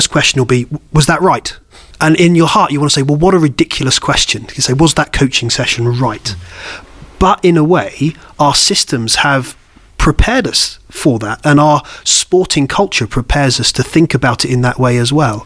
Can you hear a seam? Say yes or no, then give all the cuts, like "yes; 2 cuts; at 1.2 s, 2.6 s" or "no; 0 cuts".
yes; 1 cut; at 1.8 s